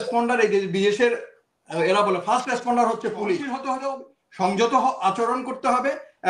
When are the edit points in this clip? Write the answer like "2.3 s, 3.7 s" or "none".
3.7 s